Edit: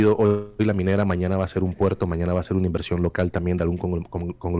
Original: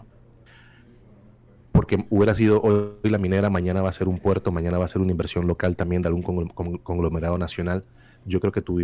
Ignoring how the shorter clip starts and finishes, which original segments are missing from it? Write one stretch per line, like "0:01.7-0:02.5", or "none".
none